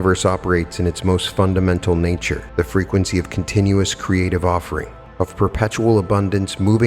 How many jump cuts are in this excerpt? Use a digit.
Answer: 2